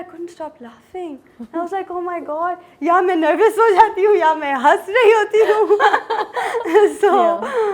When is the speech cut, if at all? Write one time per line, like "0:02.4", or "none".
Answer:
none